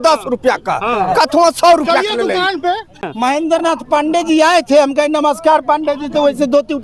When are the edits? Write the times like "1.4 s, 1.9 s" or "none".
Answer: 3.0 s

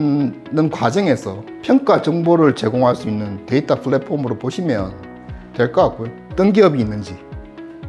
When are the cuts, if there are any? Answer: 6.3 s

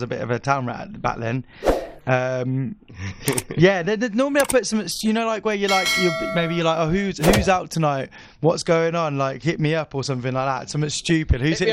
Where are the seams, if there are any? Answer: none

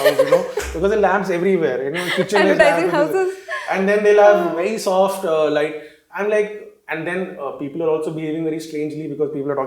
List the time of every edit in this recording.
none

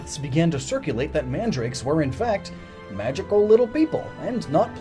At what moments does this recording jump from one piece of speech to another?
none

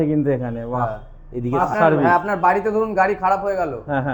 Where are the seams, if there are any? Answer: 1.6 s

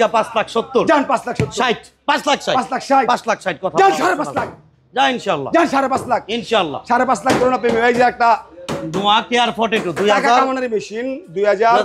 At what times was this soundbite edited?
none

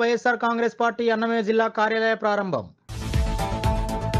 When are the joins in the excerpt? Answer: 2.9 s

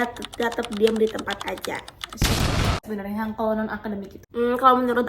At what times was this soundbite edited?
2.8 s, 4.1 s

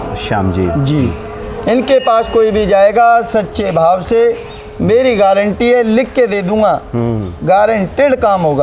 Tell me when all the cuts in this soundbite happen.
none

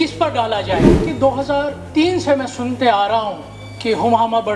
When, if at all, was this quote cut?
1.0 s

